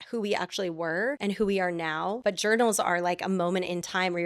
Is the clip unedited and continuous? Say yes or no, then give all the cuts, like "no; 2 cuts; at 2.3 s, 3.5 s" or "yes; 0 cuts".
no; 2 cuts; at 1.2 s, 2.2 s